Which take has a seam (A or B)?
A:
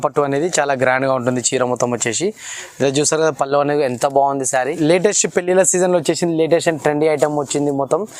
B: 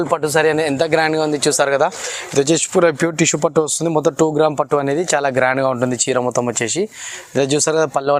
A